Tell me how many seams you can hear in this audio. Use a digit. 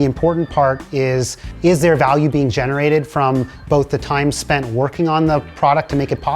1